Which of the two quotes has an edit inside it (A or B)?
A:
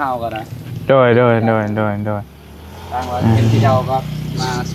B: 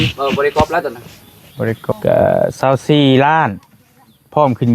B